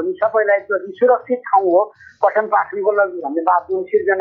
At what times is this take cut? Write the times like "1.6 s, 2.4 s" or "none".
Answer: none